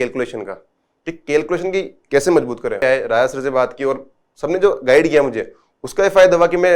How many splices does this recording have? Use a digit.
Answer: 1